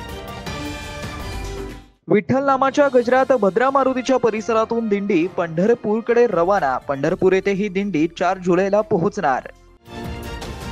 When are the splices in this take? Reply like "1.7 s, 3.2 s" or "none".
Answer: 1.5 s